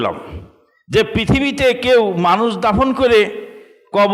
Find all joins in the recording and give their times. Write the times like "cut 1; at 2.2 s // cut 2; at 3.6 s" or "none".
none